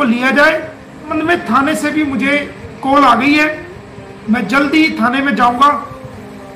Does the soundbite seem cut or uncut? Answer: cut